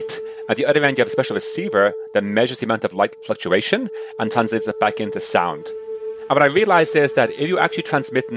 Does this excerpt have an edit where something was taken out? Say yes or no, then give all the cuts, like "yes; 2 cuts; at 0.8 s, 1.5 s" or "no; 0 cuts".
yes; 1 cut; at 5.8 s